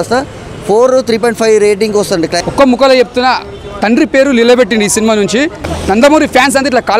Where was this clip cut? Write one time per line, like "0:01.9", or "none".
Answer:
0:02.4
0:05.6